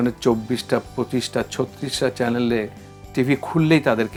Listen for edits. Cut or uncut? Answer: uncut